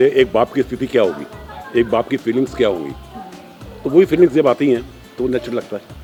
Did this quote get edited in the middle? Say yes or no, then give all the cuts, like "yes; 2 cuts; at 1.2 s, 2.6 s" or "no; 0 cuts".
no; 0 cuts